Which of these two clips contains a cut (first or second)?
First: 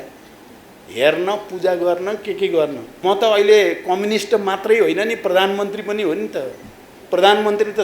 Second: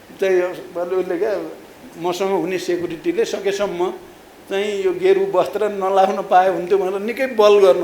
first